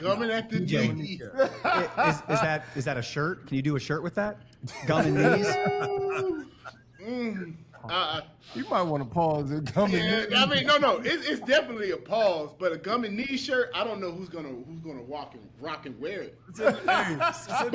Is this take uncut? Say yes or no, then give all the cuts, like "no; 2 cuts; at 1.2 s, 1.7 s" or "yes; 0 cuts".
yes; 0 cuts